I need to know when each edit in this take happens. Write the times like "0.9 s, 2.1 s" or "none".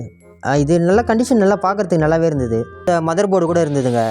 2.9 s

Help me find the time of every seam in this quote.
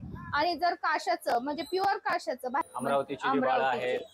2.6 s

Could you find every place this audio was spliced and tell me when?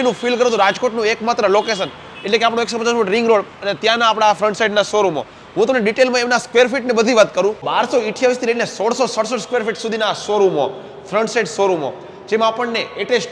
none

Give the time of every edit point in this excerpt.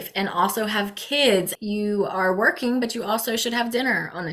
1.5 s

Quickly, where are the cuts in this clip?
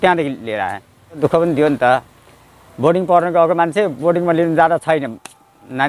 1.2 s

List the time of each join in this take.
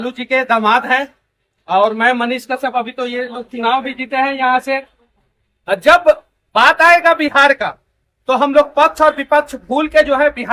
none

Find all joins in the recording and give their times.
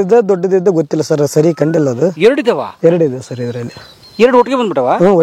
none

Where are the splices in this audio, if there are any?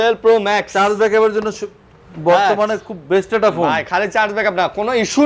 none

